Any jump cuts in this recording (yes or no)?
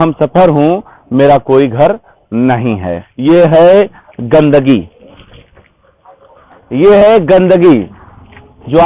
yes